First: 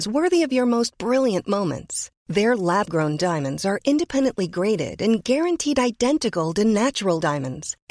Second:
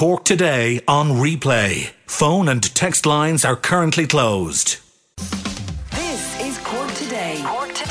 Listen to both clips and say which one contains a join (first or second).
second